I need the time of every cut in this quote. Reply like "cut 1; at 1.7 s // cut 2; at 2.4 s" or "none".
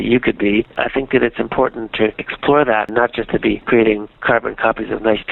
cut 1; at 2.9 s // cut 2; at 4.2 s

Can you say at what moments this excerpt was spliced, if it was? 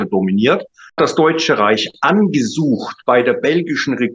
cut 1; at 1.0 s

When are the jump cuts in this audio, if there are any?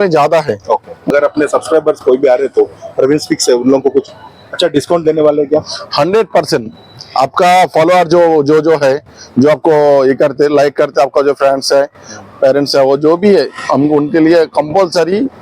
cut 1; at 1.1 s

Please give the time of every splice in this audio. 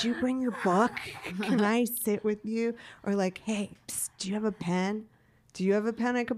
none

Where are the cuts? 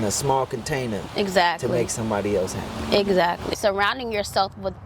cut 1; at 3.5 s

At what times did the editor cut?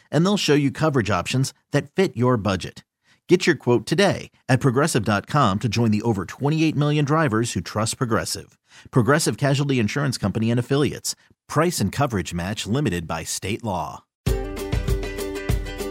cut 1; at 14.3 s

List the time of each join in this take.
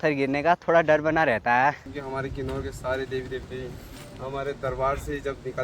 cut 1; at 1.8 s

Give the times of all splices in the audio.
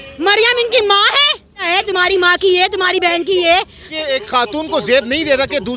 cut 1; at 1.6 s // cut 2; at 3.8 s

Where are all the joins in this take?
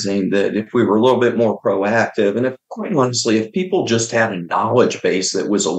none

